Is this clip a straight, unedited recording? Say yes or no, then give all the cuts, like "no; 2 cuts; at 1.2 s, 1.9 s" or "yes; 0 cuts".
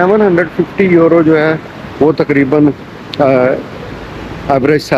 yes; 0 cuts